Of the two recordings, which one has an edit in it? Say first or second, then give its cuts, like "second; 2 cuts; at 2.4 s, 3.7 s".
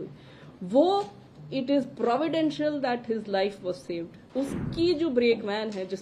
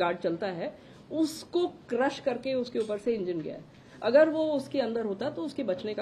first; 1 cut; at 4.2 s